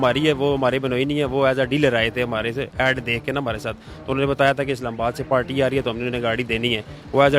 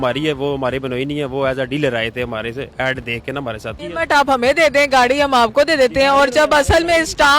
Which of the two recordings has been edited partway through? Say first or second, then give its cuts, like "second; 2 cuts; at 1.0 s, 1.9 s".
second; 1 cut; at 3.8 s